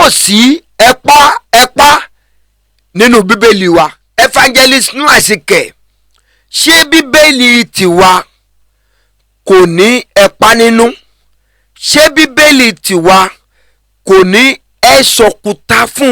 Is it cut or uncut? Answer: cut